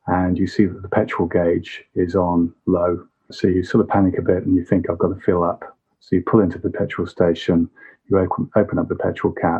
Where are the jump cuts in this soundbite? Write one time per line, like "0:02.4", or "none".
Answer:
0:03.3

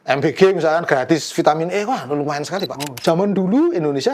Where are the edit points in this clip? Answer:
0:02.9

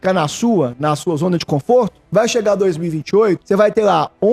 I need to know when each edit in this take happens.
0:02.0
0:03.4

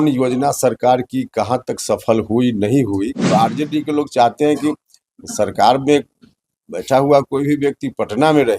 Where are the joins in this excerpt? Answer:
0:03.3

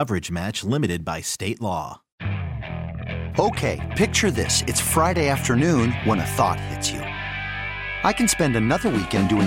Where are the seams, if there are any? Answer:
0:02.0

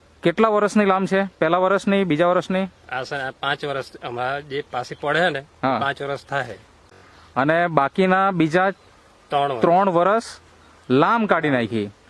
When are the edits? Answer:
0:06.7

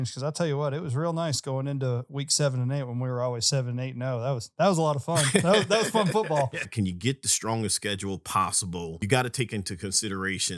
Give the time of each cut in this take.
0:06.6
0:09.0

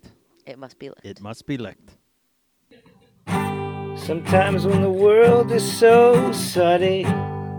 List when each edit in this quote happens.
0:02.6

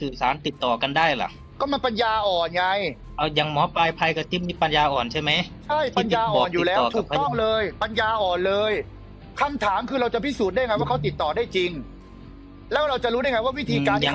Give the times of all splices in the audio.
0:03.0

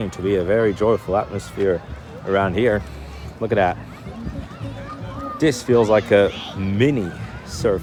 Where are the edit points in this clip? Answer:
none

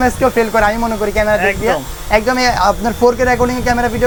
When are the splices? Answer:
none

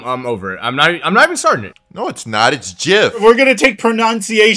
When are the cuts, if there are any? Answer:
0:01.8
0:03.2

